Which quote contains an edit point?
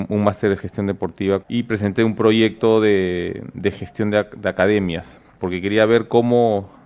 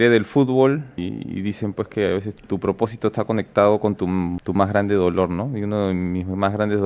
second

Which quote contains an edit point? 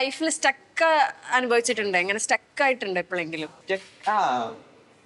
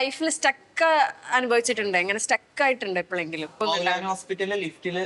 second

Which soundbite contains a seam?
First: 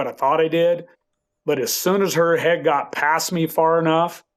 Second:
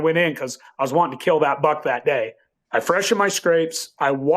second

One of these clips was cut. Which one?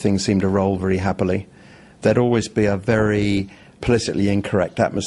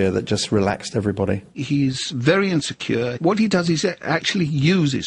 second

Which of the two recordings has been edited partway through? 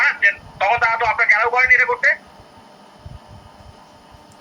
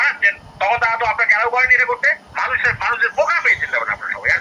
second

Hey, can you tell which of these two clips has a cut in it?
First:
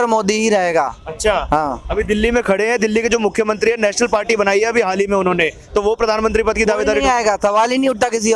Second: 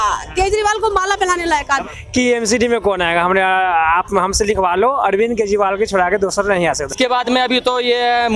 second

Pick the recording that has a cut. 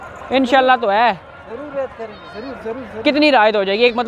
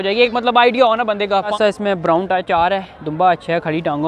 second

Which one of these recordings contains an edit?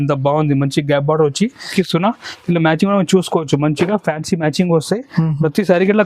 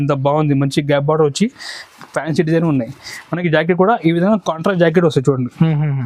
first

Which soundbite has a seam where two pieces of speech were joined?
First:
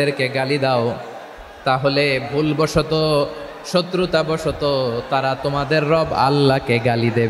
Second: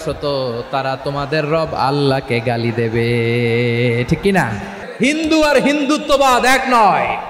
second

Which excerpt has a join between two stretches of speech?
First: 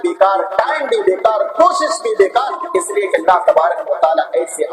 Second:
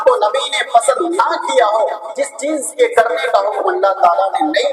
first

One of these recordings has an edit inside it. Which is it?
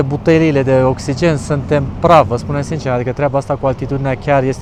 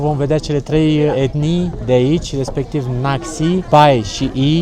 second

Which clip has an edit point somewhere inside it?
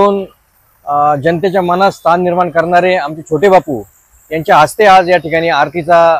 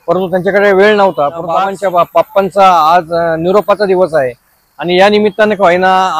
second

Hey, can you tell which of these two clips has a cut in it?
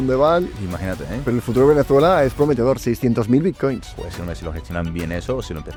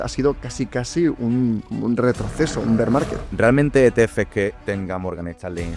second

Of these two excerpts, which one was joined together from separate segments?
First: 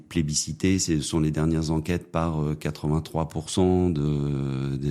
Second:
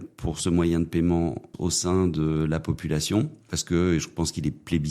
second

